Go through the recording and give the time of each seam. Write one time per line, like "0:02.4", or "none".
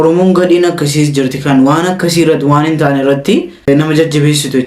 0:03.7